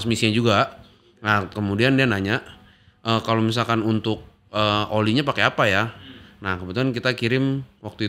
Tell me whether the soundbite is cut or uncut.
uncut